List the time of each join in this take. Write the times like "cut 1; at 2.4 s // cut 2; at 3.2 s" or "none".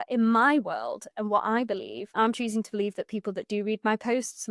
none

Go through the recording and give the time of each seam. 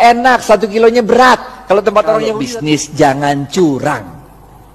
cut 1; at 2.4 s

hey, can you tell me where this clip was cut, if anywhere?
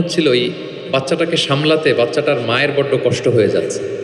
none

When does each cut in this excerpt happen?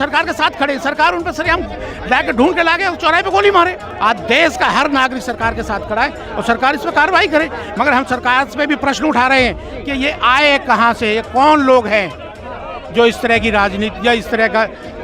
cut 1; at 3.8 s

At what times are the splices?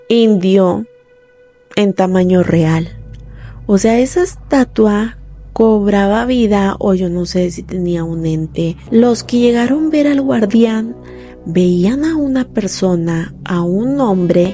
cut 1; at 8.8 s

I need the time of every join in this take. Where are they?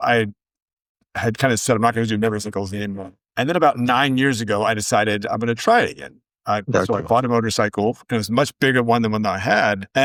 none

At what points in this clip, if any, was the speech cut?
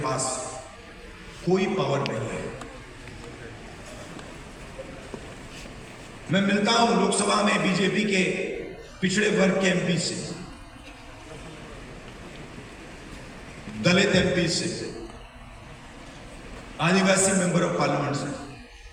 none

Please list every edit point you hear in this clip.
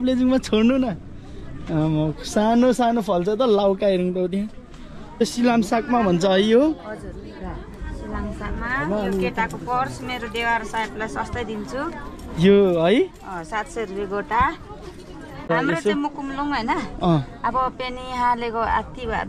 cut 1; at 5.2 s // cut 2; at 15.5 s

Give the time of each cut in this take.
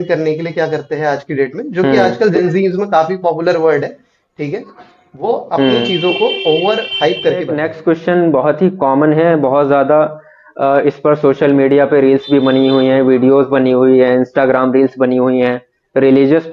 cut 1; at 7.5 s

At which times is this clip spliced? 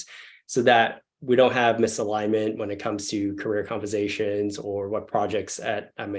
none

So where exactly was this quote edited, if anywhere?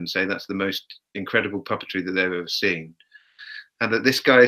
none

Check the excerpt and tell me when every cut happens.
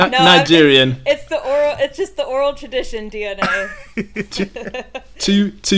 none

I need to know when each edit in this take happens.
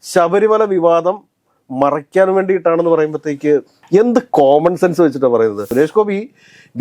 cut 1; at 3.8 s // cut 2; at 5.6 s

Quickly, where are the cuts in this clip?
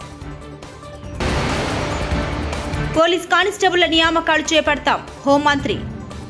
cut 1; at 1.2 s // cut 2; at 2.8 s

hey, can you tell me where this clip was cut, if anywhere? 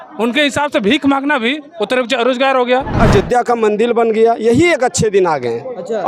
cut 1; at 3.0 s

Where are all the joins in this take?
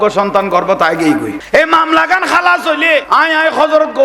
cut 1; at 1.4 s // cut 2; at 3.1 s

